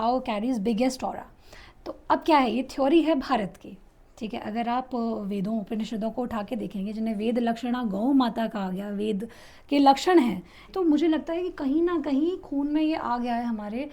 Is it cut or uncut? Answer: cut